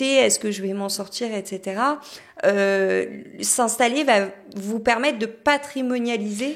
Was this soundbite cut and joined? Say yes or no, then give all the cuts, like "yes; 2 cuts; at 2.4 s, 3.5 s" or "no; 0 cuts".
no; 0 cuts